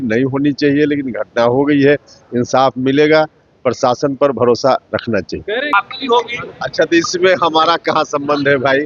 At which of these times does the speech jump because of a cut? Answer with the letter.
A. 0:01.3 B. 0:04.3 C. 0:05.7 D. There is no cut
C